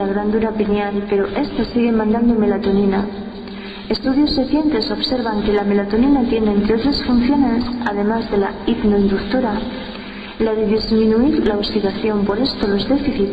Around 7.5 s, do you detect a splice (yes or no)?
no